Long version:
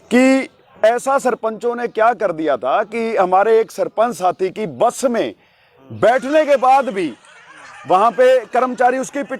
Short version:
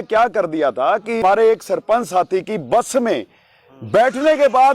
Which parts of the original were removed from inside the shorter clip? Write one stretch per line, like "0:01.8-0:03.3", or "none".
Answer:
0:03.1-0:03.3